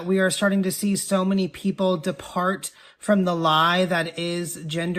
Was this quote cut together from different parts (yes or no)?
no